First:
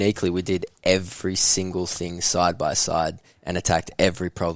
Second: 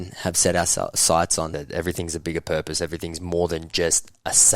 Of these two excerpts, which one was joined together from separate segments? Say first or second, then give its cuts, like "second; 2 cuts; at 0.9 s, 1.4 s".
second; 1 cut; at 1.5 s